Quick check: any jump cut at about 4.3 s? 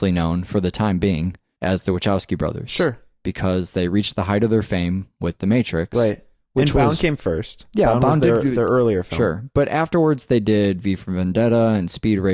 yes; 1 cut; at 4.3 s

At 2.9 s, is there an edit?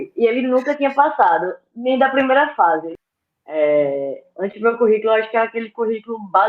yes; 1 cut; at 2.9 s

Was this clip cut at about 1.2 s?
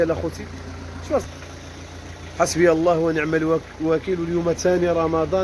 yes; 1 cut; at 1.2 s

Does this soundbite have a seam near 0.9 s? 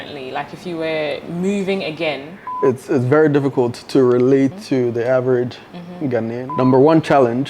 no; 2 cuts; at 2.4 s, 6.5 s

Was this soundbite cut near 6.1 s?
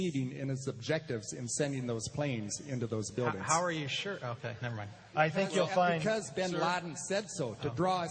yes; 1 cut; at 6.1 s

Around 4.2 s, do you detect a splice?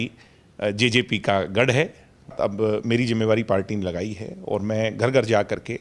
no; 1 cut; at 2.3 s

